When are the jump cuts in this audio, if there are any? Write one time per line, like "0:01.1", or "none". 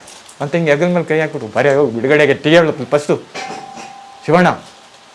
none